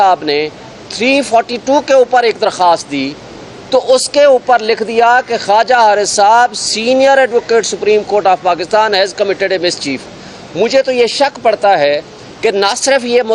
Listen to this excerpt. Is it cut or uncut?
uncut